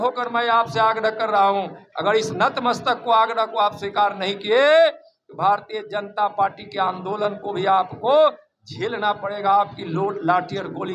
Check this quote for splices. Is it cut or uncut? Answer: uncut